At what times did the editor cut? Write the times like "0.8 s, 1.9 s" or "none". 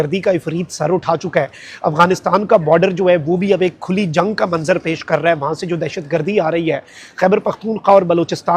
none